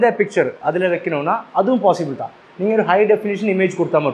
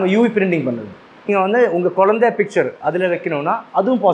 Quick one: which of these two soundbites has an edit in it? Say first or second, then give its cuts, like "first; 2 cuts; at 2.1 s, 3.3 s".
second; 1 cut; at 1.3 s